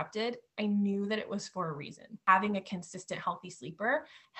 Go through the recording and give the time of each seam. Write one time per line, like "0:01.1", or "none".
0:02.2